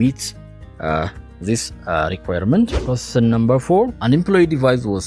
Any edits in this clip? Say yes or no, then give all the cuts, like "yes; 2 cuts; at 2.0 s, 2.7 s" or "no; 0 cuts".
yes; 2 cuts; at 2.8 s, 4.0 s